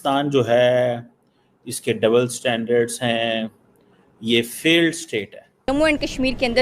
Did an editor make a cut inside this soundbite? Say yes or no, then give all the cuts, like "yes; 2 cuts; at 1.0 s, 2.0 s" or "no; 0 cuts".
yes; 1 cut; at 5.7 s